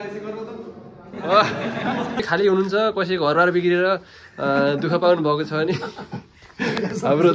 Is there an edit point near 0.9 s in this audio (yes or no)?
no